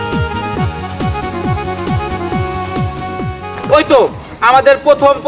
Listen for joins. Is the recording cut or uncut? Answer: uncut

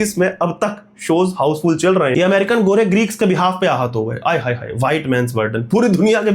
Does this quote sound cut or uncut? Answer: cut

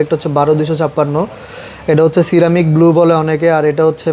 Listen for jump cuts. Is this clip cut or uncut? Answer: uncut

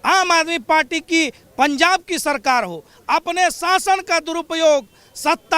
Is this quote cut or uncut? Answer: cut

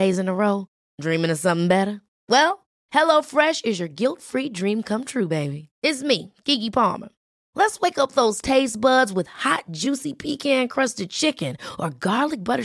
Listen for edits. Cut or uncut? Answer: uncut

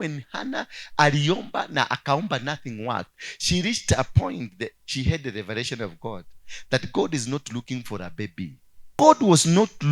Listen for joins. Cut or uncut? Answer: cut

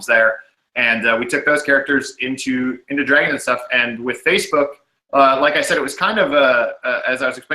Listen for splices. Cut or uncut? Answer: cut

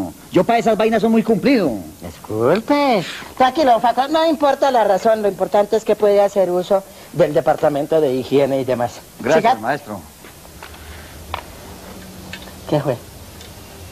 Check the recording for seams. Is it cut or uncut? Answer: cut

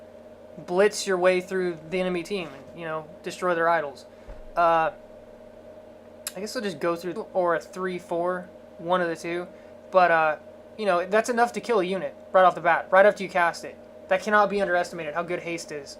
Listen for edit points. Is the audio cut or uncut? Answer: uncut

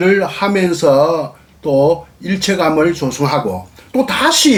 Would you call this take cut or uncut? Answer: uncut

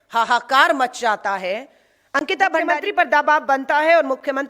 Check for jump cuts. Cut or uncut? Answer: cut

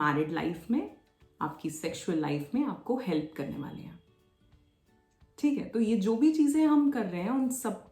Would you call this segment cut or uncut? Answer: uncut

